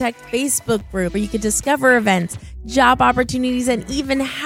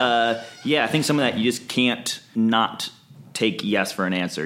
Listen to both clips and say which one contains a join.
second; 1 cut; at 2.2 s

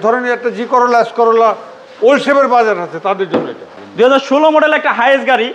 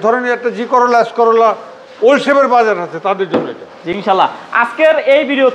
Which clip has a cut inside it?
first; 1 cut; at 3.8 s

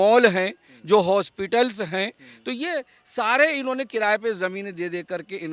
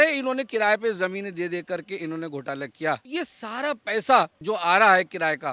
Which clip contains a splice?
second; 2 cuts; at 3.1 s, 4.4 s

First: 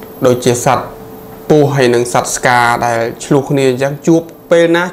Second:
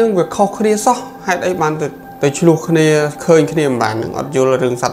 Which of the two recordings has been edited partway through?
second; 1 cut; at 2.0 s

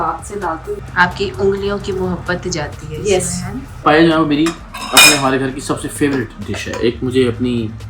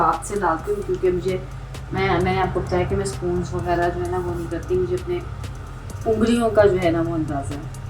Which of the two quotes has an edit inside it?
first; 2 cuts; at 0.8 s, 3.8 s

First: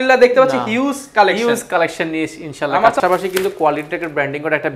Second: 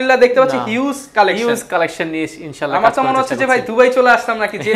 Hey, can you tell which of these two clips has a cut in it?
first; 1 cut; at 3.0 s

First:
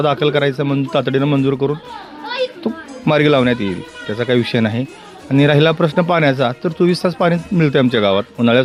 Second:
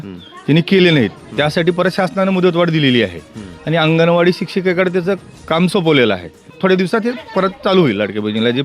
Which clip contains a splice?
second; 1 cut; at 6.5 s

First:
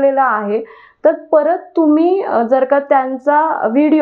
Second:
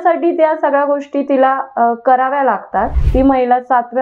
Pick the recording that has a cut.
second; 1 cut; at 3.0 s

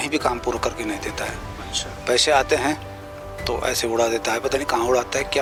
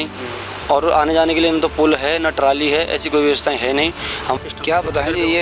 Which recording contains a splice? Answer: second; 1 cut; at 4.4 s

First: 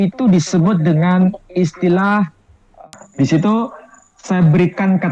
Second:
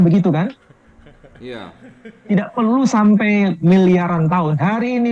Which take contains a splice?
first; 1 cut; at 2.9 s

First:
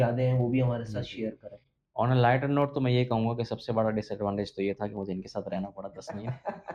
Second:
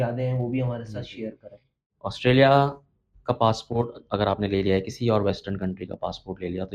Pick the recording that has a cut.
second; 1 cut; at 1.8 s

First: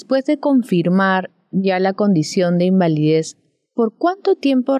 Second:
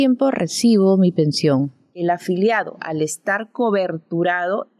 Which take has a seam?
second; 1 cut; at 1.8 s

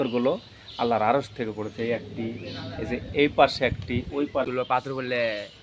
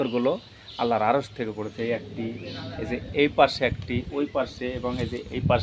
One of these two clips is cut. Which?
first; 1 cut; at 4.5 s

